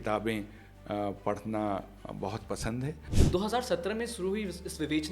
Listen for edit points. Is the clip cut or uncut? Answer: cut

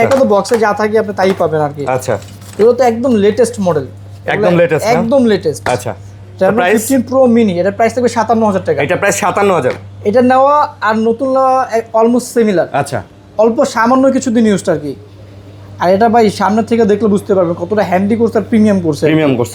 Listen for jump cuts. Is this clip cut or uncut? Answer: uncut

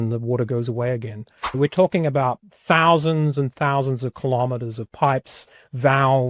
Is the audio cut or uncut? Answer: cut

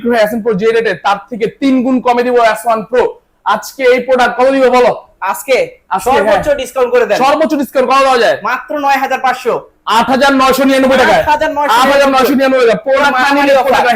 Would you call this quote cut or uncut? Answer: uncut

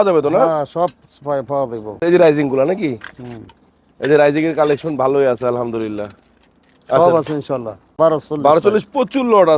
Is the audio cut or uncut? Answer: cut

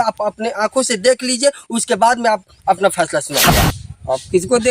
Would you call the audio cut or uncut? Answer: cut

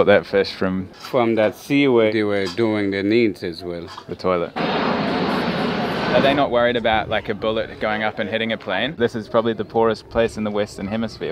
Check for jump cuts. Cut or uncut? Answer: cut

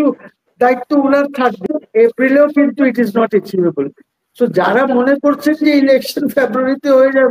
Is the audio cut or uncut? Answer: cut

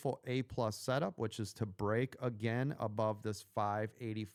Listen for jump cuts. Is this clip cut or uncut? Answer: uncut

